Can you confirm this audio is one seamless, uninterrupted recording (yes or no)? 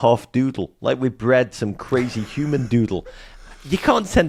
yes